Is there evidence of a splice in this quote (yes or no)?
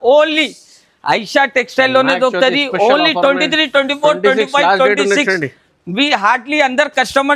no